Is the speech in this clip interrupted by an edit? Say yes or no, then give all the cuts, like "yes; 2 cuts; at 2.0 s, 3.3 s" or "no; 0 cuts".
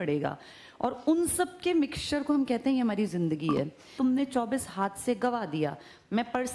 yes; 1 cut; at 3.9 s